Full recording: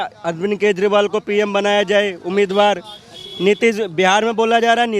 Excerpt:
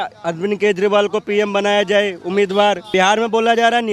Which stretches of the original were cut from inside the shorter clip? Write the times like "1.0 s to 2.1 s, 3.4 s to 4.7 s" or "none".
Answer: 2.9 s to 3.9 s